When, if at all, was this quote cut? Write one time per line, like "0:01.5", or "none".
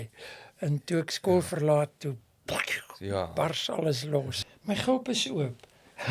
0:04.4